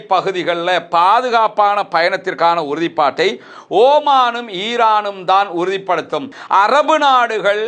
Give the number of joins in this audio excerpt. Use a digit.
1